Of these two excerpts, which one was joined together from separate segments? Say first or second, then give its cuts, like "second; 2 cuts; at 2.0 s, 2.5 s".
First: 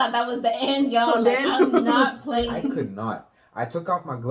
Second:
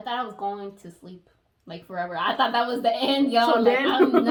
first; 1 cut; at 2.8 s